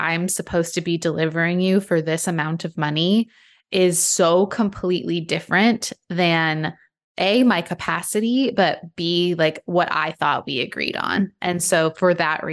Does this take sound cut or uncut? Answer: uncut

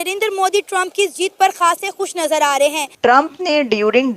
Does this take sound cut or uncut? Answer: cut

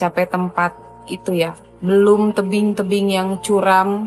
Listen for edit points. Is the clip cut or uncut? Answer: cut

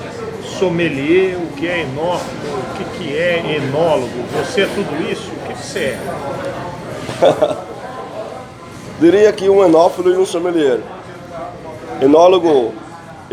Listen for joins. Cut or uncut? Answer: uncut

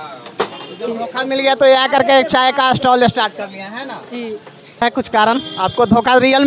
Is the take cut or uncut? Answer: cut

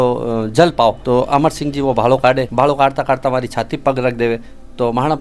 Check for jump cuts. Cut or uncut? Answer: cut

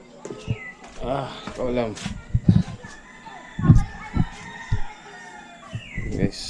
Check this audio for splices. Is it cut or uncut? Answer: uncut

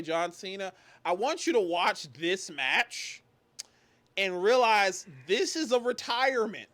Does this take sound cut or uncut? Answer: uncut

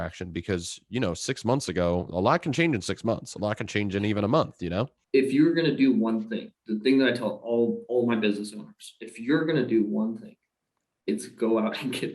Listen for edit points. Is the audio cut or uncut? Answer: cut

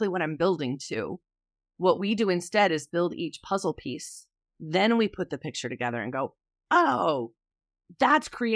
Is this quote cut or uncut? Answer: cut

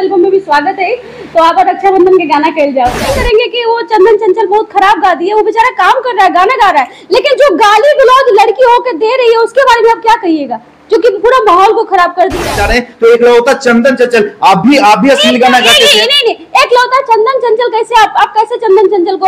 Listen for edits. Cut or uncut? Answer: cut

